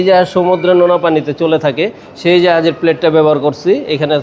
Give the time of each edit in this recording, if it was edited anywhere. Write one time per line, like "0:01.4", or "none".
none